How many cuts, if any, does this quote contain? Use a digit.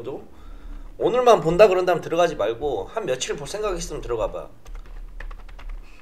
1